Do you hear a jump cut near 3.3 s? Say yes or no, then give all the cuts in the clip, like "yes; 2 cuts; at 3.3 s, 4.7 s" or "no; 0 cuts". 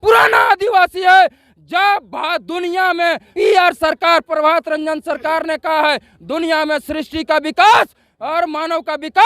yes; 1 cut; at 3.3 s